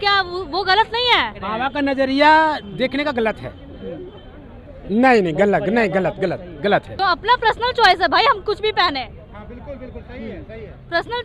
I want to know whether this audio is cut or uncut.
cut